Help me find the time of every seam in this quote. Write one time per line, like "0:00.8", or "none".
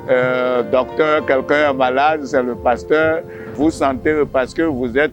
0:03.5